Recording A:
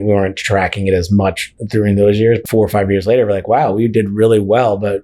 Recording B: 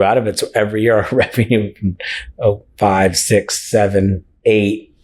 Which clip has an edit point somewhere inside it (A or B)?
A